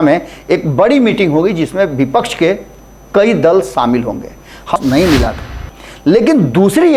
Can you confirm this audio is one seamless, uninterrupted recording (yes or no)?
no